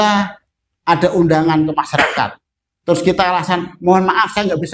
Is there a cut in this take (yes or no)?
no